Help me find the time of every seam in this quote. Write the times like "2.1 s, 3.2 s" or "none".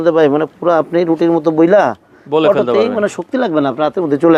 none

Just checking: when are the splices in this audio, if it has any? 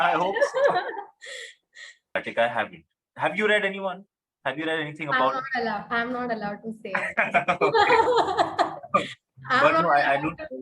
2.1 s

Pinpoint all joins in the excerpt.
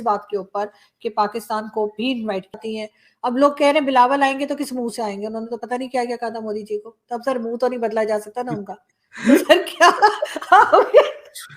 2.6 s

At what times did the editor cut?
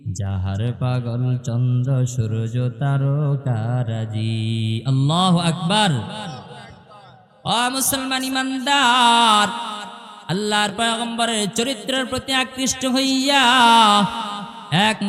7.2 s

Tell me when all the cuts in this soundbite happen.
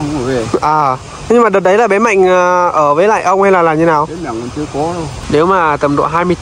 5.1 s

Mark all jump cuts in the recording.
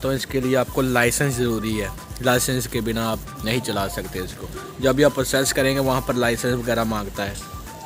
none

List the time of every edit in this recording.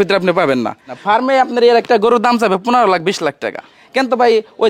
1.0 s, 3.8 s

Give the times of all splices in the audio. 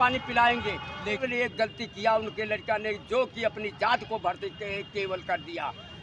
1.2 s

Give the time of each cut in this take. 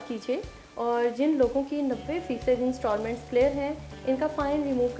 none

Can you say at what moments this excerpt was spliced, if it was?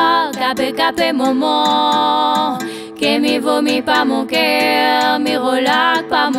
none

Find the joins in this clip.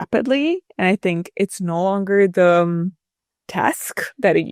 none

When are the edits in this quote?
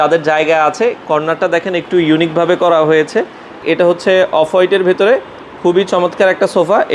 3.6 s

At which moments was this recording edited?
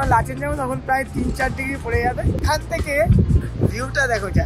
2.4 s

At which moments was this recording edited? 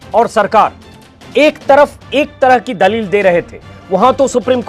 none

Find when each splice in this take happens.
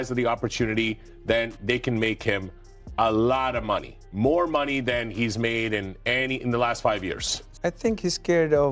7.4 s

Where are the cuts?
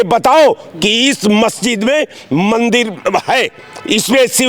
none

